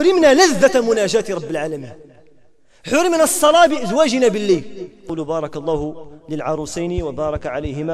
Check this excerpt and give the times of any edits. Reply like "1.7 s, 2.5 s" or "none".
5.0 s